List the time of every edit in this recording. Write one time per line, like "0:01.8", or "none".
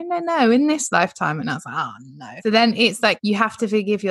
0:02.4
0:03.2